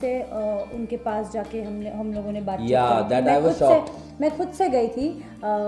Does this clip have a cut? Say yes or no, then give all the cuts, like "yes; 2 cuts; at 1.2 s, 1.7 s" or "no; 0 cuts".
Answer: no; 0 cuts